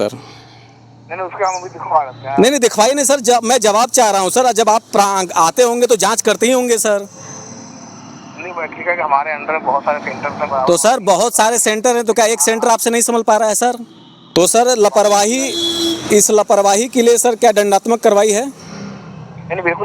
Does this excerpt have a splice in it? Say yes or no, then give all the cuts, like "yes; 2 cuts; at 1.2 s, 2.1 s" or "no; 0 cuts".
yes; 1 cut; at 14.2 s